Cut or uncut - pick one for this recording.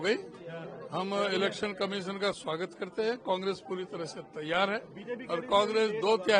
uncut